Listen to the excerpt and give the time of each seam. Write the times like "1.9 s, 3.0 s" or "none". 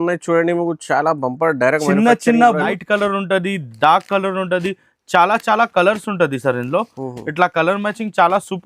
2.7 s